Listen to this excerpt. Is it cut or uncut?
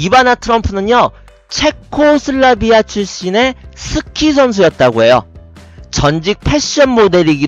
uncut